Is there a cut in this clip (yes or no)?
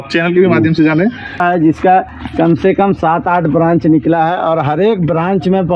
yes